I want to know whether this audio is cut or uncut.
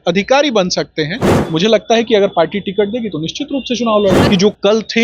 cut